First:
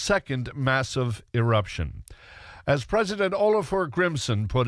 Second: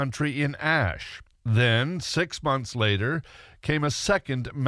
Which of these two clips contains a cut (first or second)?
first